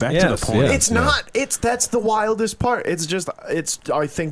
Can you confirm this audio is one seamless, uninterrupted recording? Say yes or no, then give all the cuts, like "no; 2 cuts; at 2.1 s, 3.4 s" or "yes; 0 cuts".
yes; 0 cuts